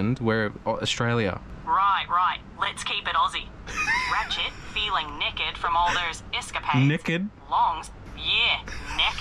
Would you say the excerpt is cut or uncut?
cut